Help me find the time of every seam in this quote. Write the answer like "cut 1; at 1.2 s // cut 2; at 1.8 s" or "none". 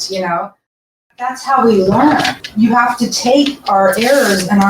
cut 1; at 1.0 s // cut 2; at 2.4 s